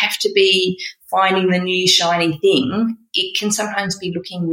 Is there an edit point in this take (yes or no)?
no